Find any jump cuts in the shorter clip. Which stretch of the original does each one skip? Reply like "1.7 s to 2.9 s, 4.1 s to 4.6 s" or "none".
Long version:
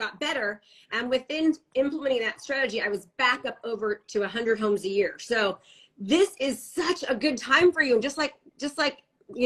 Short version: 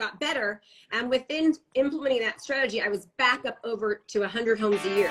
none